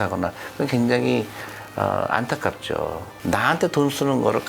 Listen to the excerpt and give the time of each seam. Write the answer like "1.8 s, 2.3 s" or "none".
3.1 s

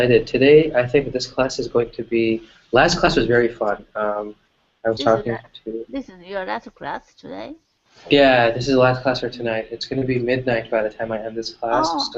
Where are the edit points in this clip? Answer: 6.7 s

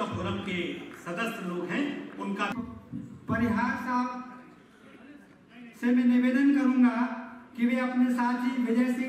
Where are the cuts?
2.5 s

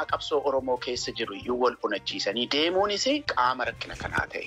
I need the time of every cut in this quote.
3.3 s

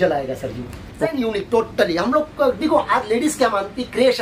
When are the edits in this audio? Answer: 1.1 s

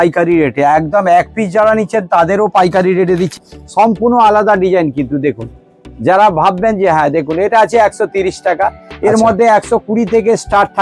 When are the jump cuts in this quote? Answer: 3.3 s

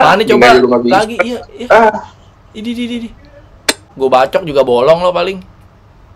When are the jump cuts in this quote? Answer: 3.9 s

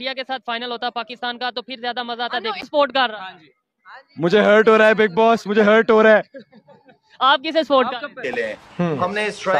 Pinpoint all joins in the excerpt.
8.2 s

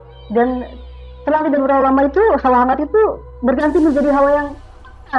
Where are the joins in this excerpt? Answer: none

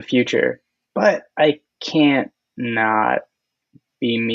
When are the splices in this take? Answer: none

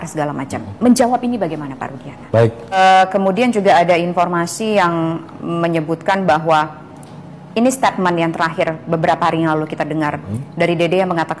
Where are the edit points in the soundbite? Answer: 2.8 s

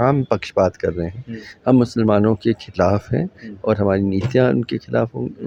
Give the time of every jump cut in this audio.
none

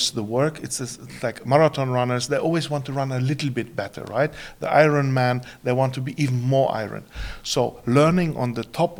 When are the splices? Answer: none

